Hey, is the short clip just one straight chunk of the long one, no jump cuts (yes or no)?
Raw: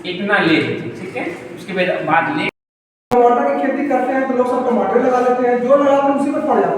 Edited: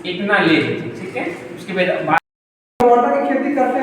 no